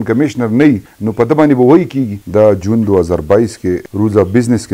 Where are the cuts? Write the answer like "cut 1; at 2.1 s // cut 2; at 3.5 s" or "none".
cut 1; at 1.0 s // cut 2; at 2.2 s // cut 3; at 3.9 s

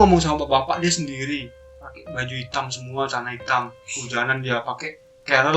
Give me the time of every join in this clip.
none

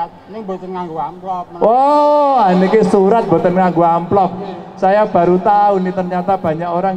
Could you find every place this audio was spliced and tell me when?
none

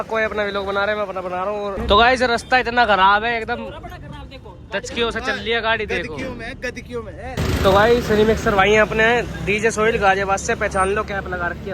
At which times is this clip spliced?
cut 1; at 1.8 s // cut 2; at 7.3 s

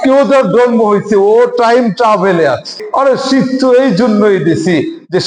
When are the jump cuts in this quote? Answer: cut 1; at 2.8 s

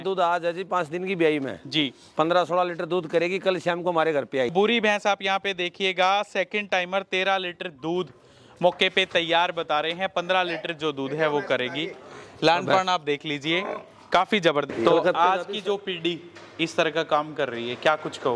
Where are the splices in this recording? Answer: cut 1; at 4.5 s // cut 2; at 14.7 s

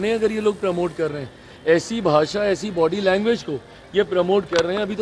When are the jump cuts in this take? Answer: none

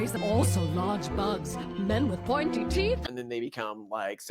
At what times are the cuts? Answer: cut 1; at 3.0 s

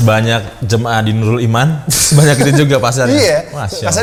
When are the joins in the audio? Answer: none

